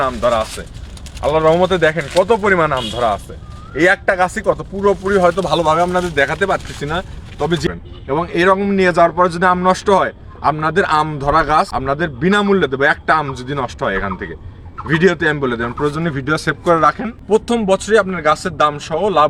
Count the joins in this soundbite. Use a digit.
3